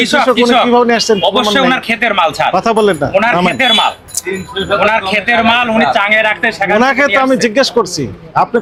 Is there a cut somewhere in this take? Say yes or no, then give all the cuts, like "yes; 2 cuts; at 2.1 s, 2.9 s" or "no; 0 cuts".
no; 0 cuts